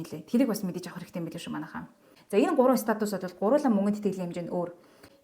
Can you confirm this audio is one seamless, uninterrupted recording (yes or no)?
no